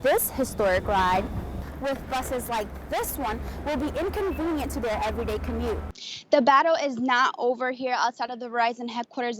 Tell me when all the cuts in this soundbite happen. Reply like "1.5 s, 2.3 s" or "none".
5.8 s